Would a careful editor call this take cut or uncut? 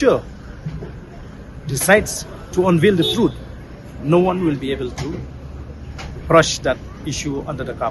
uncut